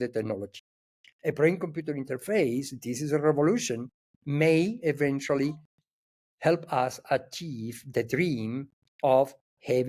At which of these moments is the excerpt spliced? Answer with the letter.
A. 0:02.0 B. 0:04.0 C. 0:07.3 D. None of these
D